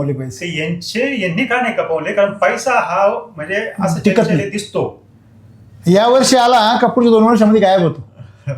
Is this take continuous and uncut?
yes; 0 cuts

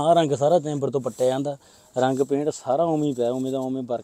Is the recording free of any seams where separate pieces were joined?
yes; 0 cuts

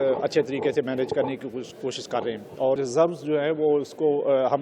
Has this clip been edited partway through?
yes; 1 cut; at 2.8 s

